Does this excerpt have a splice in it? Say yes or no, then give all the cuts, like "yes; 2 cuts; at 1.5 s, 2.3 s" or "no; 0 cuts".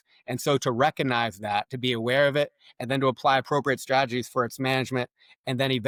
no; 0 cuts